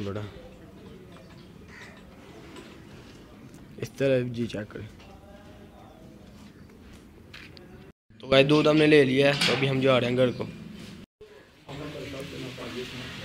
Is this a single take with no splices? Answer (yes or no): yes